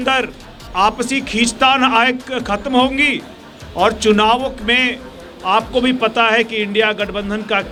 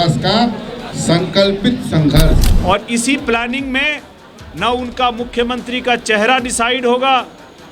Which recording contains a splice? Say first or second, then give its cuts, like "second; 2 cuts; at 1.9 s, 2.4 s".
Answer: second; 1 cut; at 2.5 s